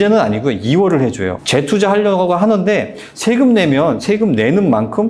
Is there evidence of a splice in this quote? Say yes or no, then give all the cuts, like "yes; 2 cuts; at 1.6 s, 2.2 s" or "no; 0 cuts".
yes; 1 cut; at 1.4 s